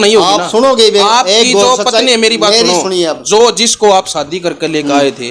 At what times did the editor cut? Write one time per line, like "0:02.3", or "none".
none